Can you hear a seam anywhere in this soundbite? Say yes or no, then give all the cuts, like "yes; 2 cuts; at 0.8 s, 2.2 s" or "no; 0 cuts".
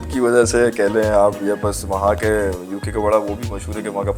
no; 0 cuts